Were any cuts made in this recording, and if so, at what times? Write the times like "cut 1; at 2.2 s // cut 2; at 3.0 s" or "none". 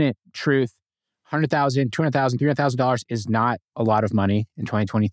none